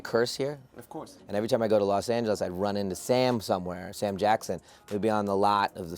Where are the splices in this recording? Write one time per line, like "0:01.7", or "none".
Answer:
0:01.1